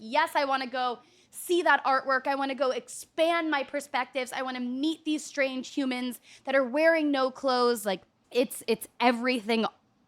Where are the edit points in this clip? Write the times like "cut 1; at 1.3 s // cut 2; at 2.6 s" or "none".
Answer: cut 1; at 8.1 s